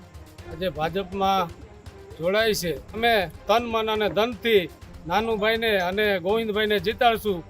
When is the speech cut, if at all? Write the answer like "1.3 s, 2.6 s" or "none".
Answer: 3.0 s